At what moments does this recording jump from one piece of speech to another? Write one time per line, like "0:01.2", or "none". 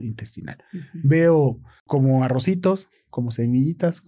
0:01.7